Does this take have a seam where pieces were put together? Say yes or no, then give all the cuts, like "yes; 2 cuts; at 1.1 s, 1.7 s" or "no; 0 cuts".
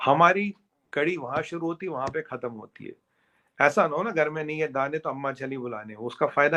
no; 0 cuts